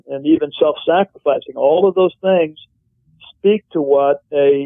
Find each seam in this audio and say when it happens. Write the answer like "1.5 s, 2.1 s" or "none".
none